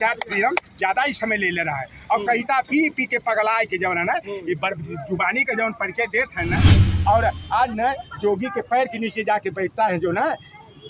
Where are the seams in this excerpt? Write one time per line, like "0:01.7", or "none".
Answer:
0:06.9